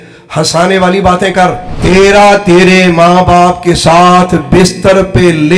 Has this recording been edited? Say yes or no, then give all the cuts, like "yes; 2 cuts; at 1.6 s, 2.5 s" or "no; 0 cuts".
yes; 1 cut; at 1.7 s